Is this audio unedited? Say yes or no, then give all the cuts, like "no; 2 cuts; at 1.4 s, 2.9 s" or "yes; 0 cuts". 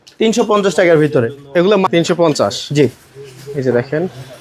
no; 1 cut; at 1.8 s